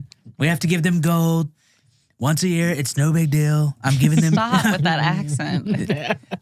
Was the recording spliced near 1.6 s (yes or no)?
no